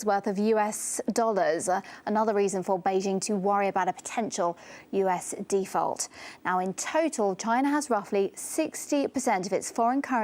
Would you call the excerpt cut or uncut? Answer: uncut